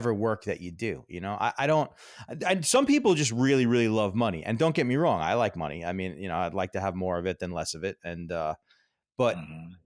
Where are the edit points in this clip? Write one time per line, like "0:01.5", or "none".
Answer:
none